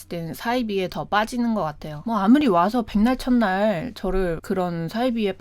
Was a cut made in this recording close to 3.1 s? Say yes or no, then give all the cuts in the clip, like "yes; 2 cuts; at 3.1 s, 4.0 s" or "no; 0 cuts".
no; 1 cut; at 1.9 s